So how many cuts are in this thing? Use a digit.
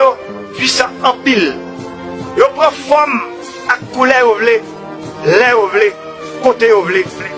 1